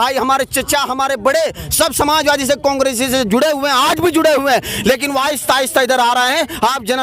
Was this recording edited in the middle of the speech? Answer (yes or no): no